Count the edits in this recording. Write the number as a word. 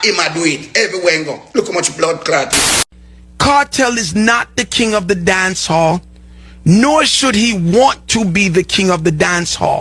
one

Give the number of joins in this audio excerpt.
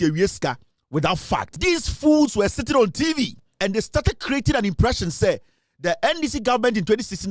two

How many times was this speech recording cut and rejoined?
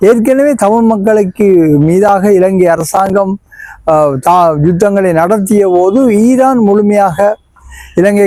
zero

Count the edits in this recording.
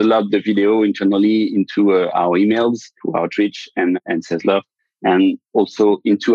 two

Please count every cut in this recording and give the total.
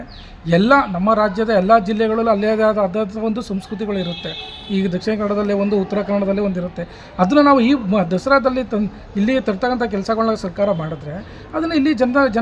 zero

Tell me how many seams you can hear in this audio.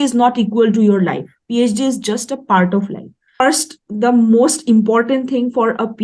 one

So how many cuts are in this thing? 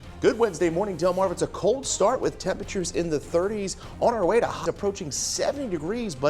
one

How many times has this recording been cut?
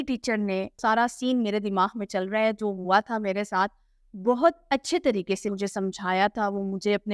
two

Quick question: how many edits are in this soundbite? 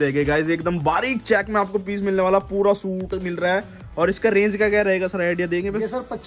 zero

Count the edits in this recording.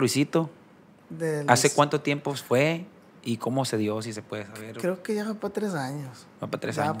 zero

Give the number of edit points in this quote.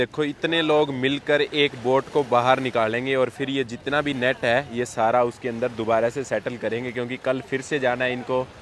zero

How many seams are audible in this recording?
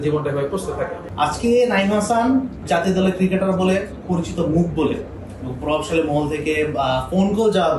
three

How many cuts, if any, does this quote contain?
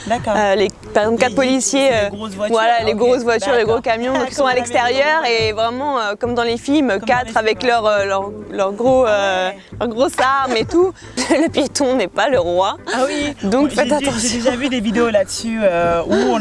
one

